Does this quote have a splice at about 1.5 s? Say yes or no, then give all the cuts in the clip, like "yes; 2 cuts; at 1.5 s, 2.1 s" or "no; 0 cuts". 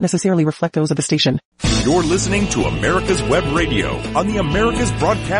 yes; 1 cut; at 1.5 s